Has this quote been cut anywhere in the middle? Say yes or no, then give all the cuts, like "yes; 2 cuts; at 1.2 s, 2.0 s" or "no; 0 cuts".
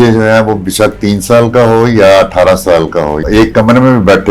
yes; 1 cut; at 3.2 s